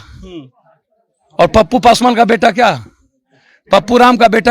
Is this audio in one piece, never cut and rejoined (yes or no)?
yes